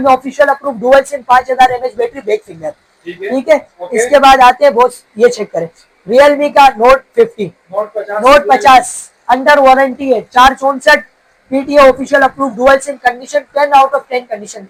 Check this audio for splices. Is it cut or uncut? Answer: uncut